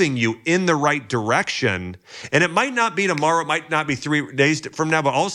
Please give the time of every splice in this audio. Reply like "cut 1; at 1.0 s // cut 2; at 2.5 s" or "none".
none